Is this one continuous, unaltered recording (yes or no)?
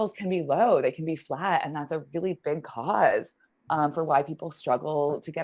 yes